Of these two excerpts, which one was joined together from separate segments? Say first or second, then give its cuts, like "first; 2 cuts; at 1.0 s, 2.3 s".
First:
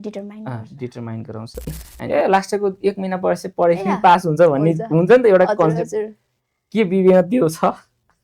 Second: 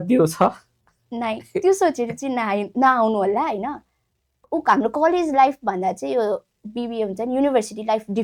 first; 1 cut; at 1.9 s